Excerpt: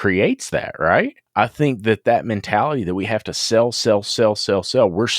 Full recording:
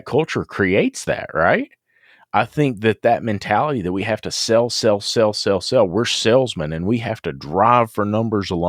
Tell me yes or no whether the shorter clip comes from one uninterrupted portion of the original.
no